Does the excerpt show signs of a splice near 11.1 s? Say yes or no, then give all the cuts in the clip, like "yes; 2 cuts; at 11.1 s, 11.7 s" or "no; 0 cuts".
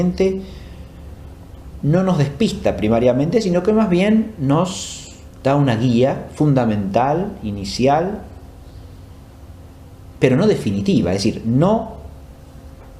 no; 1 cut; at 4.8 s